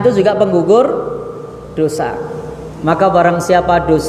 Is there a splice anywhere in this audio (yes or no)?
no